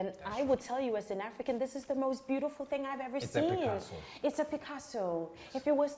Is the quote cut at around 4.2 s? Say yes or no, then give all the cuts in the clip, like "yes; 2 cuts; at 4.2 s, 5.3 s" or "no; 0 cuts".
no; 0 cuts